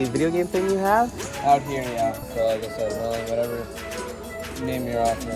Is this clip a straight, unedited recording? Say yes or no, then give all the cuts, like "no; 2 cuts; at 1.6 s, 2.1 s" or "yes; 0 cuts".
no; 1 cut; at 2.3 s